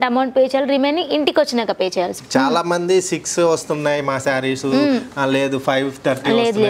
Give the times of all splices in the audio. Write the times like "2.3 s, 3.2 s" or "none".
2.2 s